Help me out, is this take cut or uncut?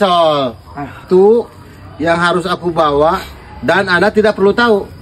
cut